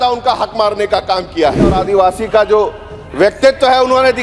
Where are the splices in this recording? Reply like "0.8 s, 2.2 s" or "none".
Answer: 1.8 s